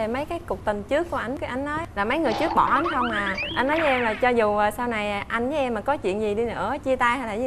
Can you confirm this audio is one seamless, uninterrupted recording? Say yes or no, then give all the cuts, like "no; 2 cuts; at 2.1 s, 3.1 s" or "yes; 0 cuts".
yes; 0 cuts